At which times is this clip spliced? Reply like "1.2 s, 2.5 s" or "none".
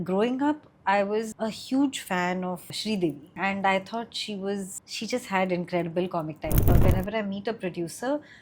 1.3 s, 2.8 s, 4.7 s, 6.7 s